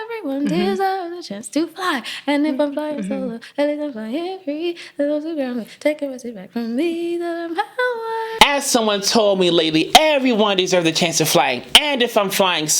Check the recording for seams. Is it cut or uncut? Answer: cut